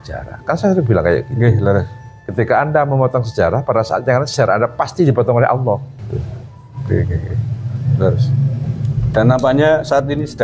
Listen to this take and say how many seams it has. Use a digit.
2